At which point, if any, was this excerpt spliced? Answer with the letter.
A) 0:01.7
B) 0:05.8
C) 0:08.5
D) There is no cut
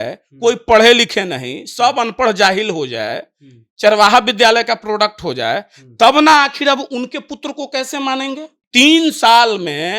C